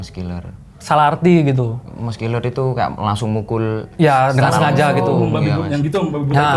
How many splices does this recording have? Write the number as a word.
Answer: one